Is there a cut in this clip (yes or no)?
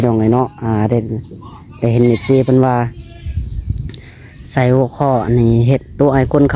no